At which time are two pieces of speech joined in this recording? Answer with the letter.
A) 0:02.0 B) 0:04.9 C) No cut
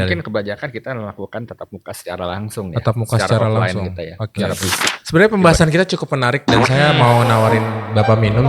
B